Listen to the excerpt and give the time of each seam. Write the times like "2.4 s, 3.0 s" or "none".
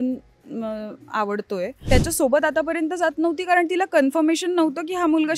1.9 s